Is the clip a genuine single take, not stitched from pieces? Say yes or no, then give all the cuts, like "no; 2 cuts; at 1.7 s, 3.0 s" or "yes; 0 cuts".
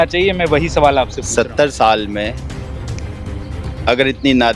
yes; 0 cuts